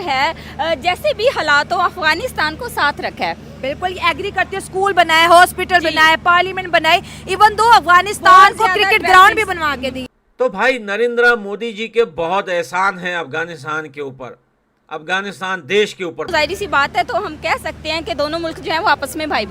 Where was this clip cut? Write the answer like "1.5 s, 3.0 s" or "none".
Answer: 10.0 s, 16.3 s

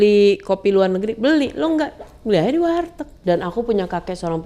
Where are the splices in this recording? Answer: 3.1 s

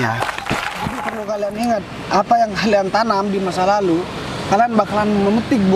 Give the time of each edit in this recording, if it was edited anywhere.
1.1 s

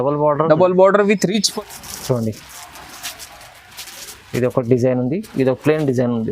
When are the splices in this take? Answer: 1.5 s

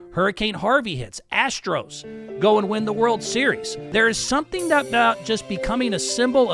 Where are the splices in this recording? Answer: 3.7 s

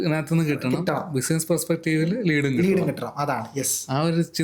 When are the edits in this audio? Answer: none

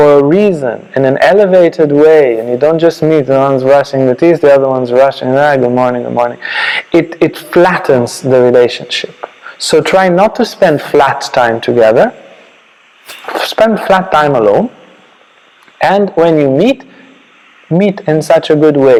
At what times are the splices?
none

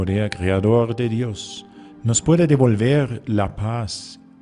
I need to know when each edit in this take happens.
none

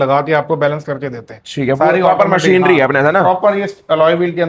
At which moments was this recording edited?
none

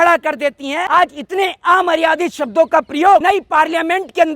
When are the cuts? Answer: 0.8 s, 3.2 s

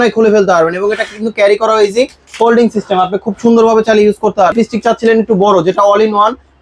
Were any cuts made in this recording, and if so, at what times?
4.5 s

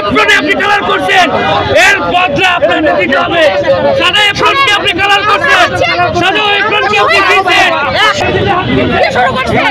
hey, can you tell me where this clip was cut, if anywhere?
8.2 s

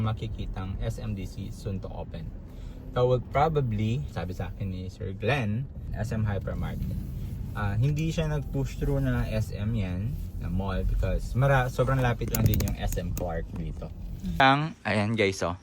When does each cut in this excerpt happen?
4.1 s, 5.8 s, 14.4 s

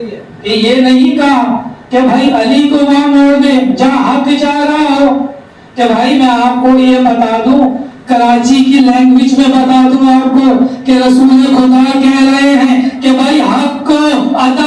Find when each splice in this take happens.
none

